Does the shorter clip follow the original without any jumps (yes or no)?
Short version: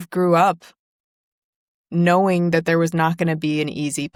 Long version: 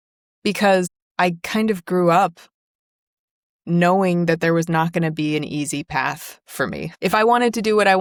yes